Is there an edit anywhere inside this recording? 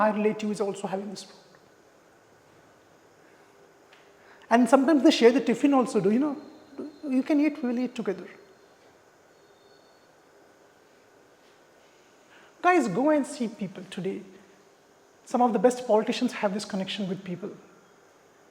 yes; 1 cut; at 11.8 s

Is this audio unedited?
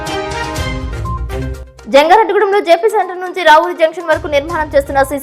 yes; 0 cuts

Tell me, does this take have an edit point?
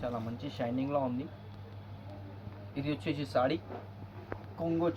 no; 0 cuts

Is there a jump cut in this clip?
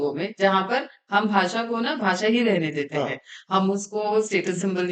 no; 0 cuts

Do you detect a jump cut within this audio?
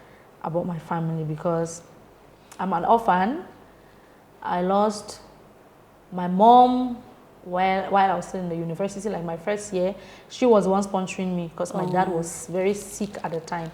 no; 0 cuts

